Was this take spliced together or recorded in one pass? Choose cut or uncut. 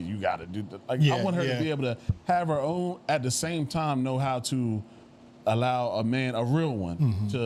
uncut